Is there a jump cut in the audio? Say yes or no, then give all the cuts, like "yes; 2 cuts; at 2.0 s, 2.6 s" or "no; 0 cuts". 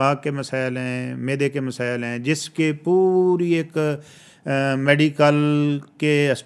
no; 0 cuts